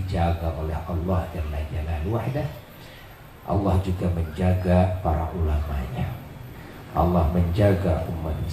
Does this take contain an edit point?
no; 0 cuts

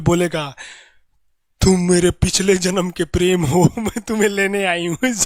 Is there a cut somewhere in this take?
no; 0 cuts

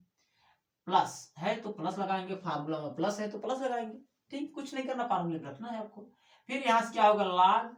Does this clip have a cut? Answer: no; 0 cuts

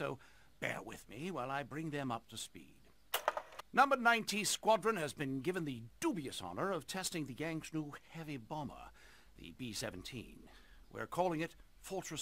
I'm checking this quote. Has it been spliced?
yes; 1 cut; at 5.2 s

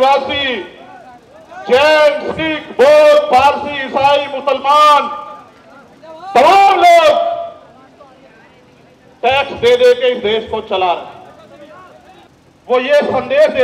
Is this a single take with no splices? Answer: no; 1 cut; at 12.3 s

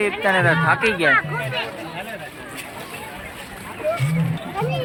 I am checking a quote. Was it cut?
no; 0 cuts

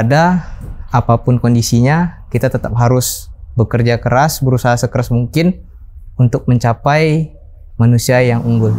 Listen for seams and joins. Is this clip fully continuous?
yes; 0 cuts

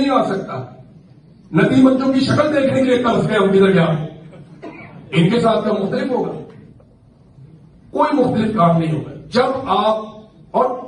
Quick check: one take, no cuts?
yes; 0 cuts

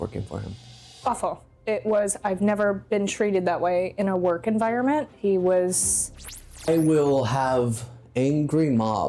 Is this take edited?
yes; 1 cut; at 6.5 s

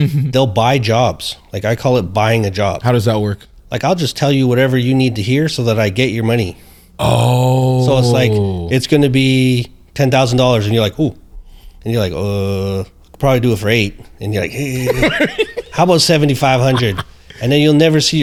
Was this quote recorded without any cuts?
yes; 0 cuts

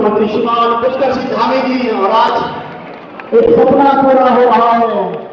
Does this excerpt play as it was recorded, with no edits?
yes; 0 cuts

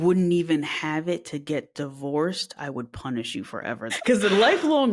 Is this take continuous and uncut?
no; 1 cut; at 3.9 s

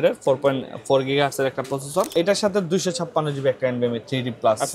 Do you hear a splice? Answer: yes; 1 cut; at 2.1 s

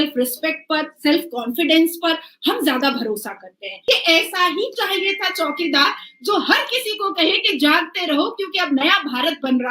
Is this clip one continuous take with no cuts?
no; 1 cut; at 3.7 s

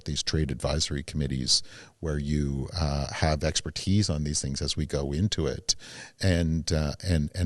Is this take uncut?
yes; 0 cuts

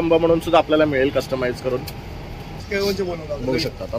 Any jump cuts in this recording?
yes; 1 cut; at 2.6 s

